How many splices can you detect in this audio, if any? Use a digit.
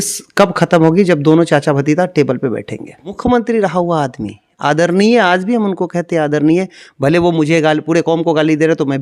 1